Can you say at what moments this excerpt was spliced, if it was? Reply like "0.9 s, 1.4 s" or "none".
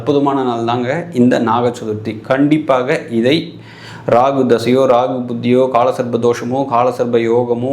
none